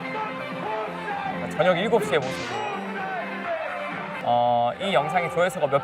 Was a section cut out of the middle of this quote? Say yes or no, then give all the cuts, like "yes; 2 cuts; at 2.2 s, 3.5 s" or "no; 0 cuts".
yes; 1 cut; at 4.2 s